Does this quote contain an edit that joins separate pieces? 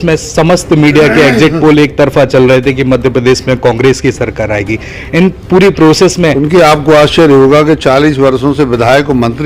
yes; 1 cut; at 6.3 s

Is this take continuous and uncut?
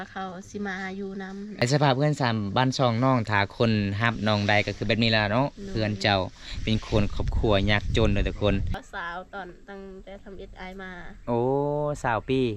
no; 2 cuts; at 1.6 s, 8.8 s

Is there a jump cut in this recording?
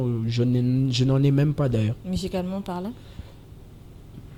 no; 0 cuts

